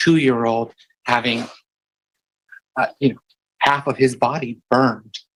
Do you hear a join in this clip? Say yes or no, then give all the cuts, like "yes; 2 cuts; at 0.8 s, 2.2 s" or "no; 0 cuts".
no; 0 cuts